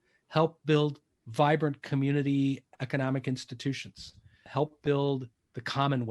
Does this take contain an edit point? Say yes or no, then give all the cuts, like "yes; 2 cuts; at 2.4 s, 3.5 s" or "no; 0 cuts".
yes; 1 cut; at 4.4 s